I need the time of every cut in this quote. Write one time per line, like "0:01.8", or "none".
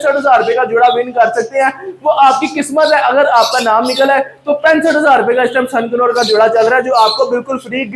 none